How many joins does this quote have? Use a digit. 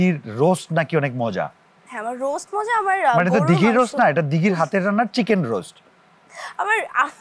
0